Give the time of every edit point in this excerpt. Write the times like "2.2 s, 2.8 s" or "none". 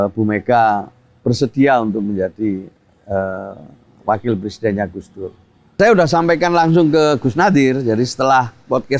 5.8 s